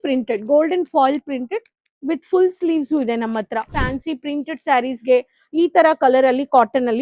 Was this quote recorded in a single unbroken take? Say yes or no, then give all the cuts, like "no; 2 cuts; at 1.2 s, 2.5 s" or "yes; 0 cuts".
no; 1 cut; at 3.8 s